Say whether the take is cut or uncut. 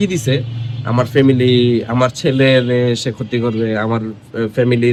uncut